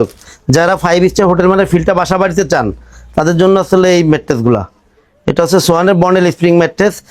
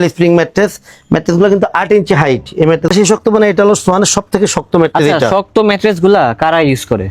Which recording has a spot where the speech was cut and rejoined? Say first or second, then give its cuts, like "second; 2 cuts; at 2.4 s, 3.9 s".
second; 1 cut; at 2.9 s